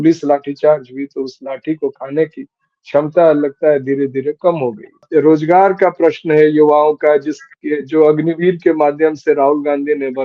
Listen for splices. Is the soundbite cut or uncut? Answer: cut